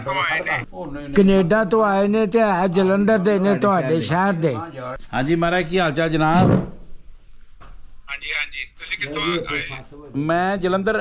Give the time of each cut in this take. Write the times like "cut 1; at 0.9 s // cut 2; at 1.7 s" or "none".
none